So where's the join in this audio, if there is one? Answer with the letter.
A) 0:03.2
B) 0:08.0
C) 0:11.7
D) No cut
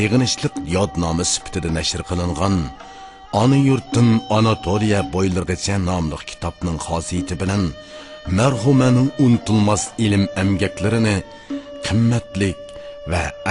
C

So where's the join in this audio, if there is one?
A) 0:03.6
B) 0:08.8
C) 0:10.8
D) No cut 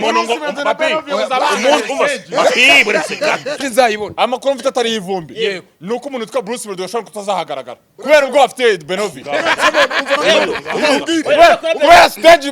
A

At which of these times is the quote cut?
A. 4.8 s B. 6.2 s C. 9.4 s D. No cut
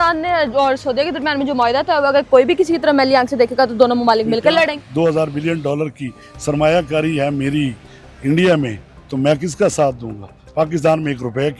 A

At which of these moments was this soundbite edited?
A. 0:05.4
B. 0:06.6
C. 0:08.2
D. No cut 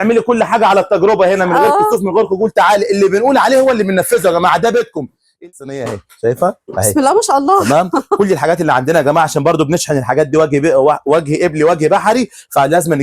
A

